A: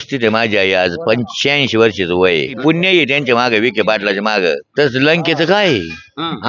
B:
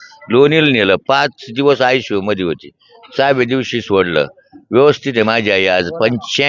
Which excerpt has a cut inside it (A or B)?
A